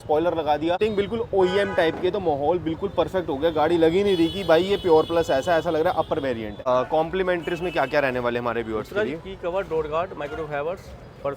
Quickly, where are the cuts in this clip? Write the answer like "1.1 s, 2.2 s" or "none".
0.8 s, 6.5 s